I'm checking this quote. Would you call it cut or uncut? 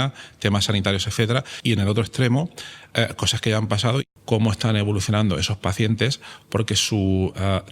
cut